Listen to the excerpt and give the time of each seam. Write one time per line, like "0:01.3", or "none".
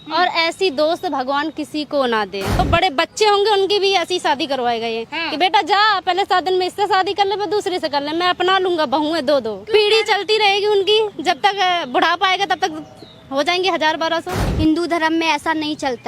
0:02.6
0:09.6
0:14.5